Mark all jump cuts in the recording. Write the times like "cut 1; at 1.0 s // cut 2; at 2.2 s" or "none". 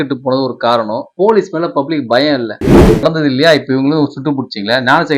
cut 1; at 1.0 s // cut 2; at 3.0 s